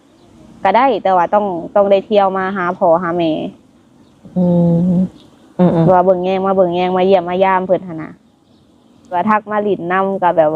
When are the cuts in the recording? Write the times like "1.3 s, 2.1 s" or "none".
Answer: 9.2 s